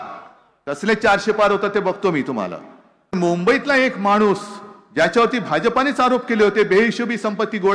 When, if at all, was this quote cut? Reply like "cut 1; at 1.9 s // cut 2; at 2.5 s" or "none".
cut 1; at 3.2 s